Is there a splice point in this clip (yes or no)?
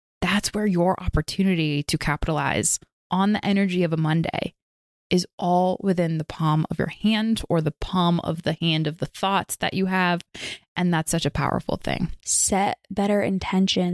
yes